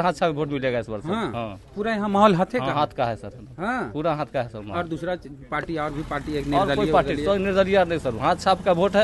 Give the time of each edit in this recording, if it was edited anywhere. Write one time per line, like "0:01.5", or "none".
none

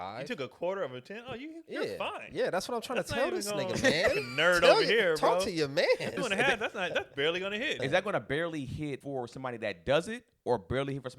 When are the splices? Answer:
0:06.2
0:07.8
0:09.0

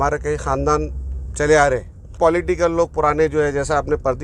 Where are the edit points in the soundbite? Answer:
0:02.1

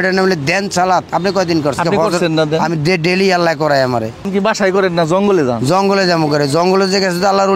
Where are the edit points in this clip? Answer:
0:01.8
0:04.3

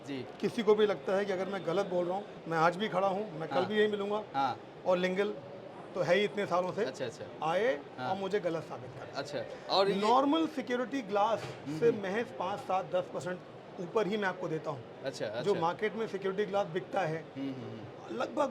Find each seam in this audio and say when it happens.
0:02.4

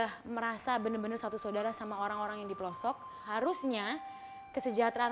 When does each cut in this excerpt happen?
0:03.2

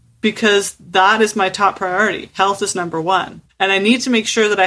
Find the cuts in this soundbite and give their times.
0:03.4

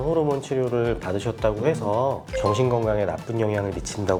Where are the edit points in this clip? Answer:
none

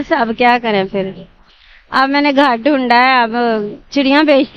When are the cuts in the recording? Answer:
none

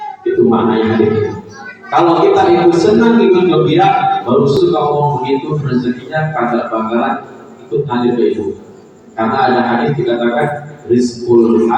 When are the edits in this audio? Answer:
0:04.6

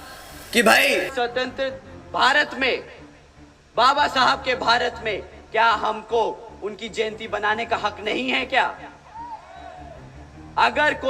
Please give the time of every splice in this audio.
0:01.1

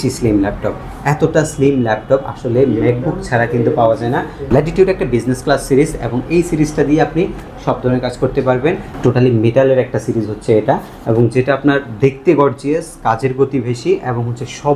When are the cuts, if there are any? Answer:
0:04.4
0:08.9

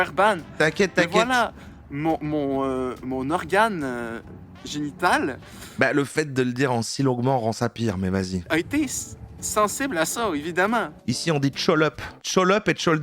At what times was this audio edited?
0:08.4
0:10.9
0:12.1

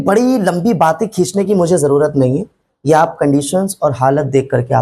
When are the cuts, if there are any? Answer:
none

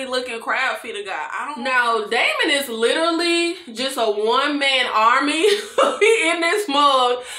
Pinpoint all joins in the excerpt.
0:01.5

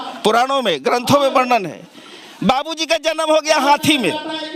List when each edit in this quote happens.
none

